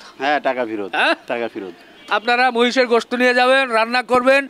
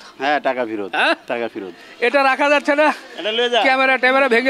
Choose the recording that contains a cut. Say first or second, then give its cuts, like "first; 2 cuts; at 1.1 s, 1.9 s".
second; 1 cut; at 1.9 s